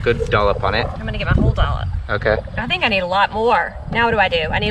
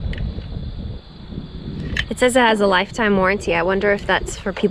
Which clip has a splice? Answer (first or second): first